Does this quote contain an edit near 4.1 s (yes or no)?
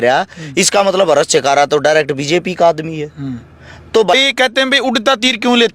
yes